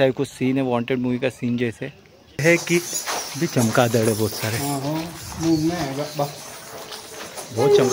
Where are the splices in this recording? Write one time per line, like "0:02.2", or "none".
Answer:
0:02.4